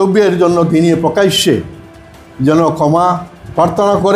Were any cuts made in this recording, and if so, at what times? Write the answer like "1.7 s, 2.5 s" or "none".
none